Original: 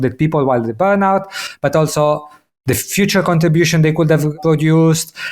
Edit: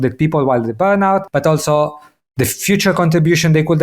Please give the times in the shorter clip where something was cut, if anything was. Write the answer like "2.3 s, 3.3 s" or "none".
1.3 s